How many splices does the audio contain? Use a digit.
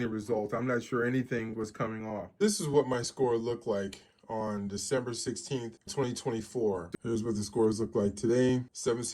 3